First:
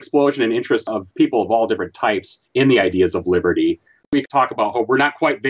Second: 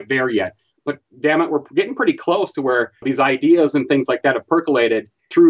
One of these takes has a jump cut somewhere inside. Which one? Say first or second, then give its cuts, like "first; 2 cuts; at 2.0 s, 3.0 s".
first; 3 cuts; at 0.8 s, 2.3 s, 4.1 s